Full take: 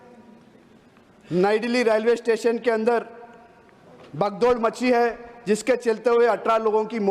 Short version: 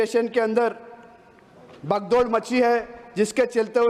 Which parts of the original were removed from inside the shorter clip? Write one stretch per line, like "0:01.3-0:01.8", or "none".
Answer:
none